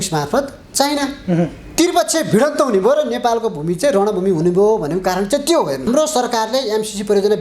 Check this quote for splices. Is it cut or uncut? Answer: cut